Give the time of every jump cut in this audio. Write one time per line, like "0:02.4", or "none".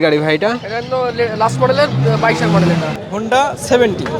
0:03.0